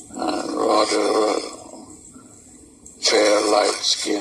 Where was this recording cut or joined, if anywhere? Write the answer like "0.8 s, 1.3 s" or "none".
2.6 s